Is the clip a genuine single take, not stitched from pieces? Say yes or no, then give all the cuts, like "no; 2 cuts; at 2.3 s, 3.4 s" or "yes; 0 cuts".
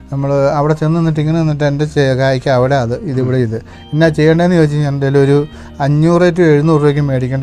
yes; 0 cuts